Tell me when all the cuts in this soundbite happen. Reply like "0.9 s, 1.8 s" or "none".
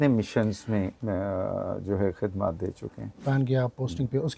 3.2 s